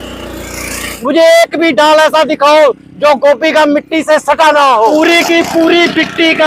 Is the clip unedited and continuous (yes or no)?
no